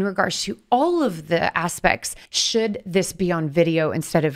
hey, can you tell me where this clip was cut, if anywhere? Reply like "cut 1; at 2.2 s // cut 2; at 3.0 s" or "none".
cut 1; at 2.2 s